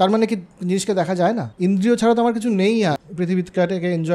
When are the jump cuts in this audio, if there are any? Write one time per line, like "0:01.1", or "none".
0:01.5
0:03.1